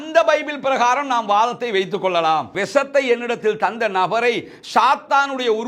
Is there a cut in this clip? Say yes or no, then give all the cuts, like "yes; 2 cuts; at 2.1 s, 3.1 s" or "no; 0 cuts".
yes; 1 cut; at 2.6 s